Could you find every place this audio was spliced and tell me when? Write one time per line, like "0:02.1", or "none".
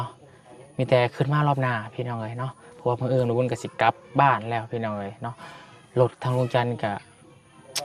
none

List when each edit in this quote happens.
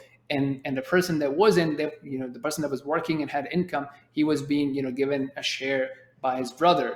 none

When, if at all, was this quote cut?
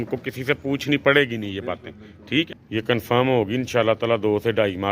0:02.5

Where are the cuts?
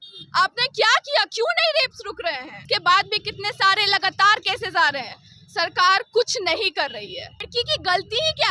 0:02.5
0:07.5

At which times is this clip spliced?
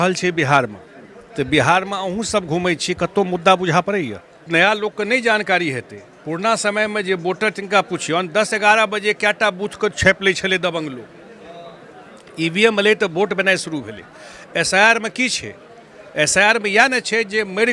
0:04.5

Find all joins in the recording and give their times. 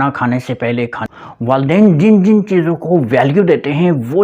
0:01.0

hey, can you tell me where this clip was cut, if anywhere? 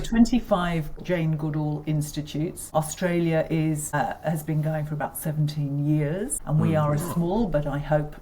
0:00.9
0:02.6
0:03.9
0:06.4

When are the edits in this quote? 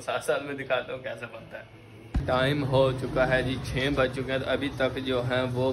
0:02.1

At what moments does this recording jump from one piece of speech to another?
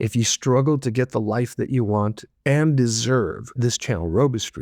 none

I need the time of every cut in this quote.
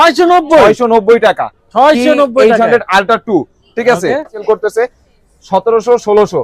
0:04.4

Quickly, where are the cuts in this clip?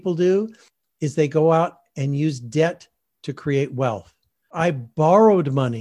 0:04.5

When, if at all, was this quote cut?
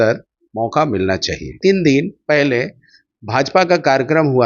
0:01.6

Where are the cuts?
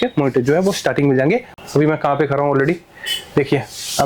0:01.5

